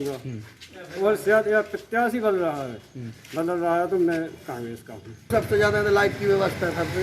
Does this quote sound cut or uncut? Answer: cut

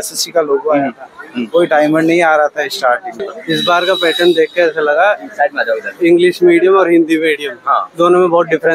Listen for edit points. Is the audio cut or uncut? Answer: cut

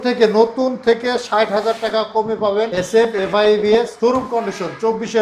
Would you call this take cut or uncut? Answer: cut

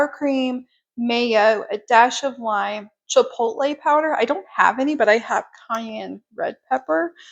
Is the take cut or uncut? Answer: uncut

